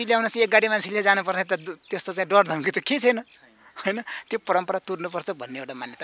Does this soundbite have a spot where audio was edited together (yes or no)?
no